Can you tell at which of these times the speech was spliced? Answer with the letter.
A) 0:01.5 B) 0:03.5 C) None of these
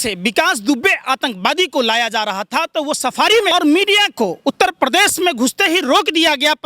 B